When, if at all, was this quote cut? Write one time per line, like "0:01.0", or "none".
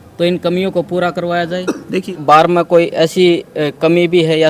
0:02.0